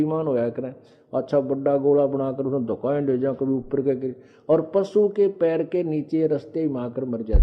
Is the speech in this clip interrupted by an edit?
no; 0 cuts

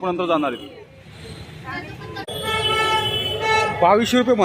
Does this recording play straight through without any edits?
no; 1 cut; at 2.3 s

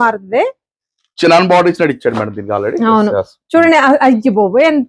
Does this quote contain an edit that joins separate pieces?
no; 0 cuts

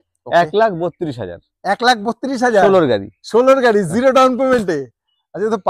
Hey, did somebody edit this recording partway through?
no; 0 cuts

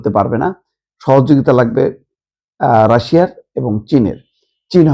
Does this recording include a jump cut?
no; 0 cuts

